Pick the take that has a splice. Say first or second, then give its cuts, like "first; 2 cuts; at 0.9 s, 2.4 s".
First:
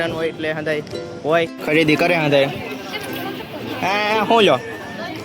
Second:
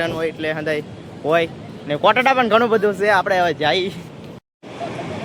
first; 1 cut; at 1.6 s